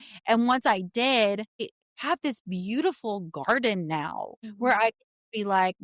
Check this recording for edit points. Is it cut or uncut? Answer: cut